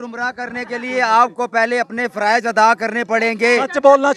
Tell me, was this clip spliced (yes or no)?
no